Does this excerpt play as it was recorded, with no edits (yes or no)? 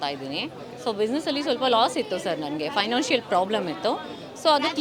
yes